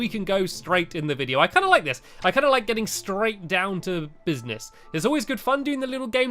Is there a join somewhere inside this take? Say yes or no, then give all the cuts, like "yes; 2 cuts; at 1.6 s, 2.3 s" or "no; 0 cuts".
yes; 1 cut; at 4.2 s